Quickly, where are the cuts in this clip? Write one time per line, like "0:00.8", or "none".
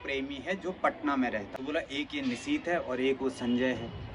0:01.5